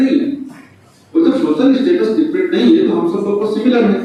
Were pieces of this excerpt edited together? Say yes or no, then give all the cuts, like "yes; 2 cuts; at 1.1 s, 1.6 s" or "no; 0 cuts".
no; 0 cuts